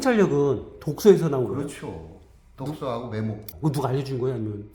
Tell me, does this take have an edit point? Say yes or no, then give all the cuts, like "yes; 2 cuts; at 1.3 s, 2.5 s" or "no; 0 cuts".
yes; 1 cut; at 3.5 s